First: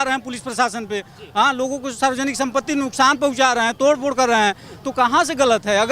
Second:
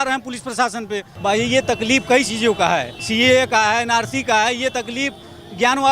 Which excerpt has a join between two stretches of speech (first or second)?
second